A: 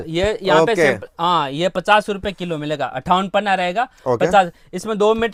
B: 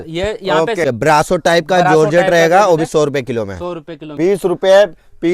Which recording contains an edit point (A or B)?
B